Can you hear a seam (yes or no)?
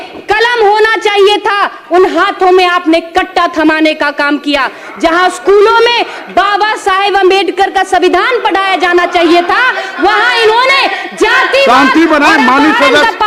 no